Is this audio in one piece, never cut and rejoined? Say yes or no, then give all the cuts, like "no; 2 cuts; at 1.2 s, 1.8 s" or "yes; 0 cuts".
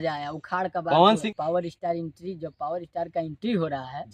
no; 1 cut; at 1.2 s